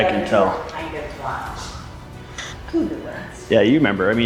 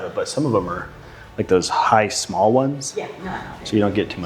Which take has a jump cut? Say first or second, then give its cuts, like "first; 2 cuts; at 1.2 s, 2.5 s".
first; 1 cut; at 2.2 s